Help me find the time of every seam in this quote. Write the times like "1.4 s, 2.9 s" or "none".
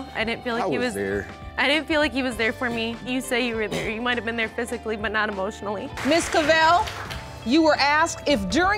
6.0 s

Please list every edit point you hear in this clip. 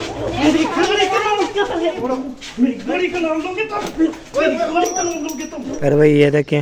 2.0 s, 5.7 s

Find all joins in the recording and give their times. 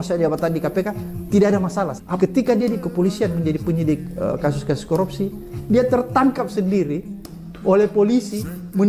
2.1 s

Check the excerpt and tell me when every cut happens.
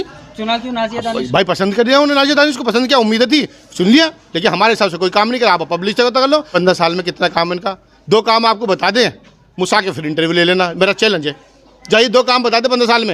6.5 s

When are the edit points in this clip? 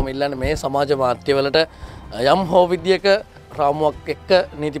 3.4 s

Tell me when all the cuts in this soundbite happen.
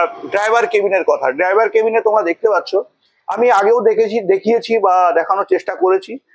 none

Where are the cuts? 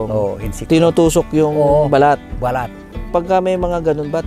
3.0 s

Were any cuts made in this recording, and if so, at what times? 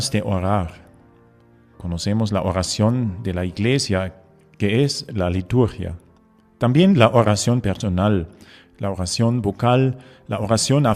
5.8 s

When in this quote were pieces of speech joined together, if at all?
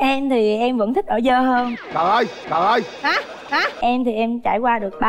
3.7 s

